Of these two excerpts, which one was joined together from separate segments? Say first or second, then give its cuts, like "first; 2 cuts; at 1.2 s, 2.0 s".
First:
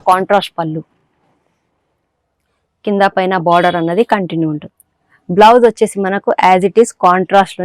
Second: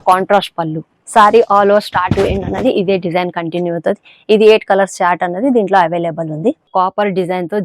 second; 2 cuts; at 1.0 s, 6.7 s